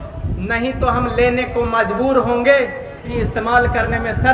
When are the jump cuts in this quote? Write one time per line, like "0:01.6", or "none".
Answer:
0:03.1